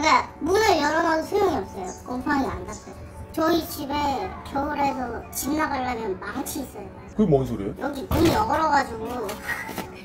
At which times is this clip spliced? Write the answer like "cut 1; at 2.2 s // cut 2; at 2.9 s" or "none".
none